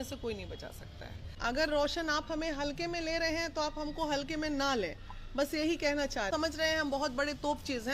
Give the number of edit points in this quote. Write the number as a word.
two